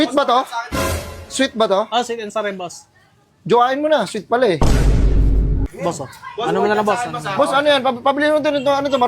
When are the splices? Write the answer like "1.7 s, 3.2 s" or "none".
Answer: 5.7 s

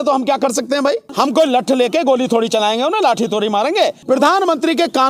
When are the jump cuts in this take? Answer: 1.1 s, 4.0 s

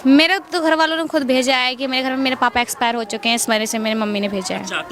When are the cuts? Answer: none

